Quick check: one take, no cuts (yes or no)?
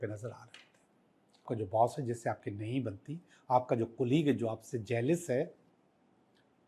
no